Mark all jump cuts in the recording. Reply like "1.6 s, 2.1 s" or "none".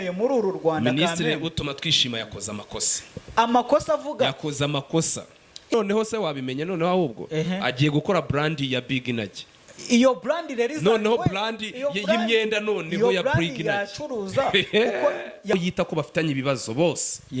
5.7 s, 15.5 s